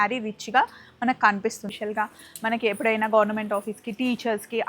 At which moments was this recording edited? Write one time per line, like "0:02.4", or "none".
0:01.8

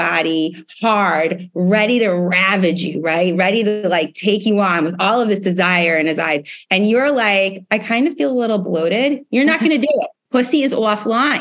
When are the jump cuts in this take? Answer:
0:10.2

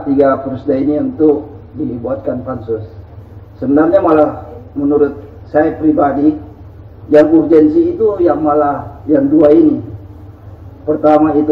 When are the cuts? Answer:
none

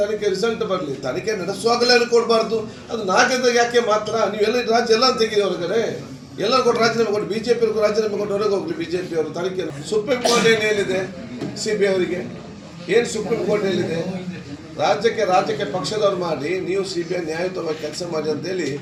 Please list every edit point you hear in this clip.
none

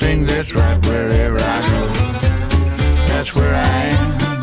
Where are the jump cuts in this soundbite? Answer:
none

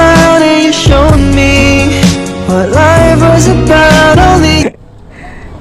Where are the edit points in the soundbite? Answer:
0:04.6

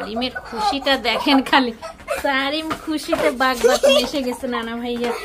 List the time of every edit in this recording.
none

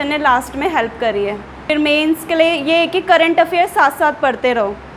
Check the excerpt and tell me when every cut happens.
0:01.7

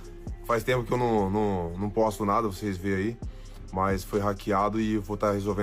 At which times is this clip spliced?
none

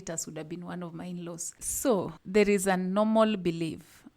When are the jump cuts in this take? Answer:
0:01.6

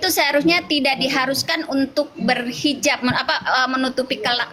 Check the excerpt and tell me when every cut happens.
none

